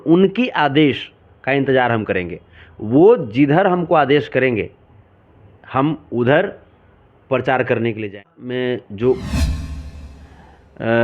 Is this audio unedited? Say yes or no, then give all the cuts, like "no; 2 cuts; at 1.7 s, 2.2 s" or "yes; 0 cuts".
no; 1 cut; at 8.2 s